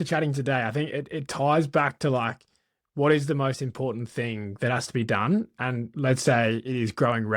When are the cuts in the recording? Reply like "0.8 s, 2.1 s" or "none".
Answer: none